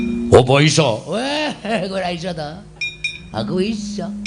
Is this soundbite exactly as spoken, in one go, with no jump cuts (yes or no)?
no